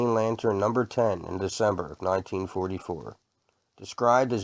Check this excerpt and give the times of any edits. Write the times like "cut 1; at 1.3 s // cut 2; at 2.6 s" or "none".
cut 1; at 3.5 s